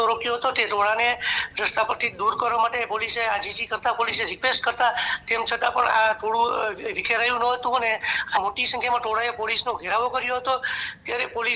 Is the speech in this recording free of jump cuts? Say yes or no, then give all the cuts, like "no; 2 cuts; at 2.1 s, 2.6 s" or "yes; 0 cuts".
no; 1 cut; at 8.4 s